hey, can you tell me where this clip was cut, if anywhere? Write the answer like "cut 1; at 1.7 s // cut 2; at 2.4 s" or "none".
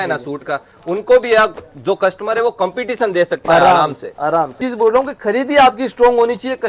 cut 1; at 4.6 s